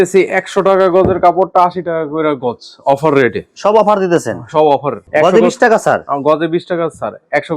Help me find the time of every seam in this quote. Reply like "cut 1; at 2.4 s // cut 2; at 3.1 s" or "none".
none